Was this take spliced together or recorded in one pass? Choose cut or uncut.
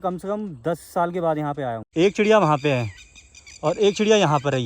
cut